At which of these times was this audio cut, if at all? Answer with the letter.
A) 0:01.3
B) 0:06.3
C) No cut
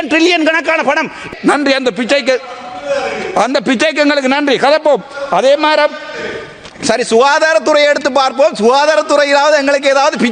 A